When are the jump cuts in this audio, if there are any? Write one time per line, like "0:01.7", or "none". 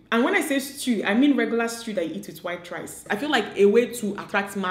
0:03.0